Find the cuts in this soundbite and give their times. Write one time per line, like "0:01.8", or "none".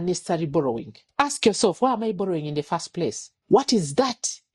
0:01.0
0:03.3